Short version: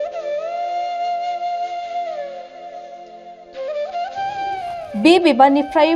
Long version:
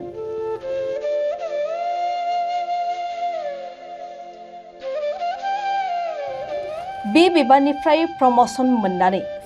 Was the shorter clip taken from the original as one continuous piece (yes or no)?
no